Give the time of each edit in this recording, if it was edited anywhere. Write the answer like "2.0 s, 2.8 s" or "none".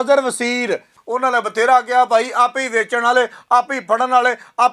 1.0 s